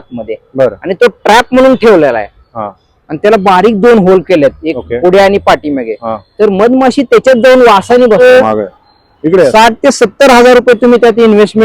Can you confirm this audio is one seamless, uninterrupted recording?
no; 1 cut; at 8.2 s

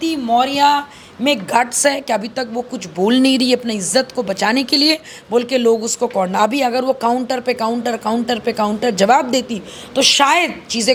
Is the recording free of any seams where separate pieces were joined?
yes; 0 cuts

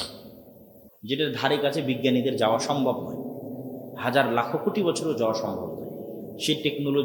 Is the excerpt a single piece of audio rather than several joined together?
no; 1 cut; at 1.0 s

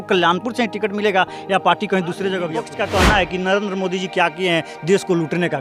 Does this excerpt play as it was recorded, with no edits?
no; 1 cut; at 2.6 s

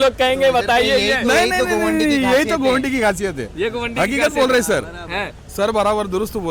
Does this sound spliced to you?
no; 0 cuts

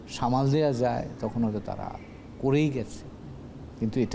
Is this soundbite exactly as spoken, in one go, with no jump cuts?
yes; 0 cuts

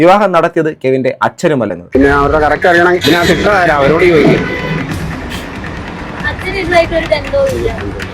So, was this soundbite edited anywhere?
yes; 1 cut; at 1.8 s

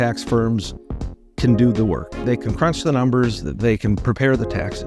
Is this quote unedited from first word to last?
yes; 0 cuts

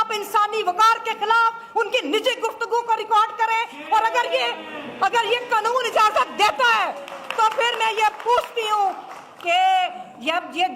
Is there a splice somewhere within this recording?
no; 0 cuts

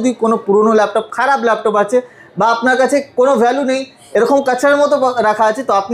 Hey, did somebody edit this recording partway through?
no; 0 cuts

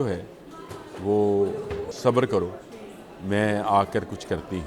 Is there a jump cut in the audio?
yes; 1 cut; at 1.8 s

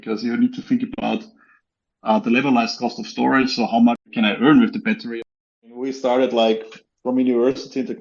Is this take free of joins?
no; 2 cuts; at 4.1 s, 5.1 s

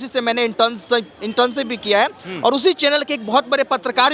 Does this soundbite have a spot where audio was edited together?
no; 0 cuts

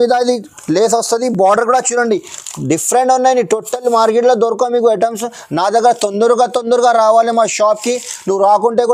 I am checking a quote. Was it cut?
no; 0 cuts

